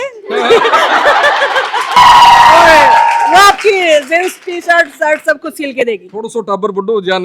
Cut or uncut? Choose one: cut